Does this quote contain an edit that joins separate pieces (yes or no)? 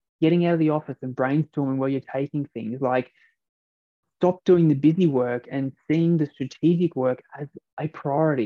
no